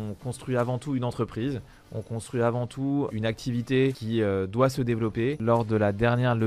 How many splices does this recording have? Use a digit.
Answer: 3